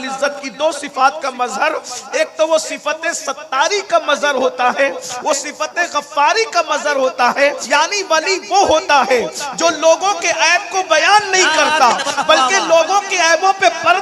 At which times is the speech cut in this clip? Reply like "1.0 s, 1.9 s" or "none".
7.6 s